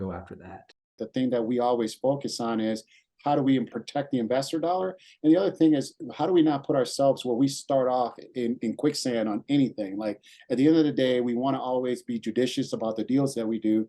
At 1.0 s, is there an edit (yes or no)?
yes